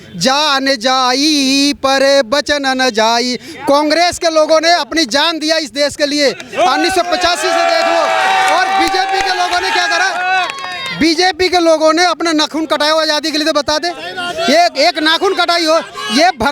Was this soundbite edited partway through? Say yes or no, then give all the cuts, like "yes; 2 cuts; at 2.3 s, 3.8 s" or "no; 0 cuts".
no; 0 cuts